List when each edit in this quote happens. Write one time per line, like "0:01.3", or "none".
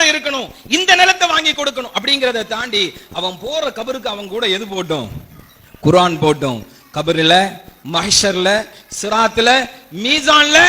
none